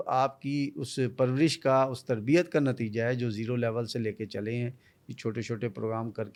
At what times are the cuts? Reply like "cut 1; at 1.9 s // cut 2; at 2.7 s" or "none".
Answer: none